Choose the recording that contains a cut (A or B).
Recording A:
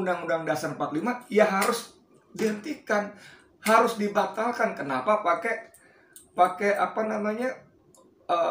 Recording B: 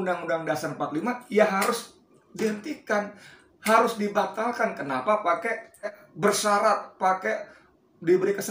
B